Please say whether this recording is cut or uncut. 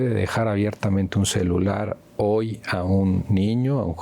uncut